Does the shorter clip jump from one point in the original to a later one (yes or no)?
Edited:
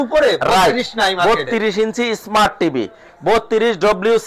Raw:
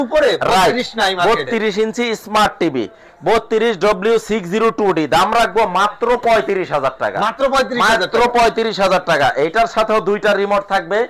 no